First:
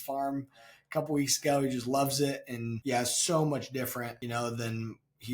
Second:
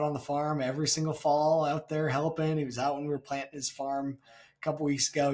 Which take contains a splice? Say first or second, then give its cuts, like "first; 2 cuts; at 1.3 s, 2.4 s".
first; 2 cuts; at 2.7 s, 4.2 s